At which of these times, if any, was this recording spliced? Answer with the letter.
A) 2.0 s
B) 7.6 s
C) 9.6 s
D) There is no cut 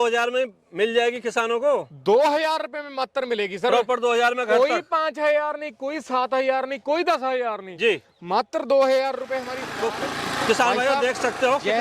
C